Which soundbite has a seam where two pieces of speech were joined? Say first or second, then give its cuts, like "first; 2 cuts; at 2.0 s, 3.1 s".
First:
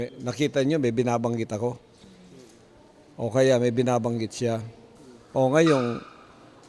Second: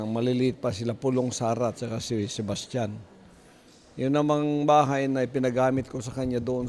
second; 1 cut; at 1.0 s